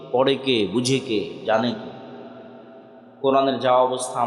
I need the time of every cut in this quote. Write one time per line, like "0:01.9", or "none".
none